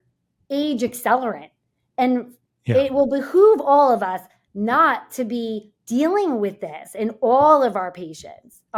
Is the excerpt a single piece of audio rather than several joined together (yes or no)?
yes